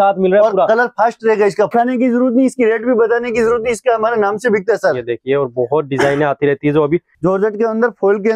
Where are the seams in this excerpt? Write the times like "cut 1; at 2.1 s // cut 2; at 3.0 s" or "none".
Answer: cut 1; at 1.7 s // cut 2; at 7.1 s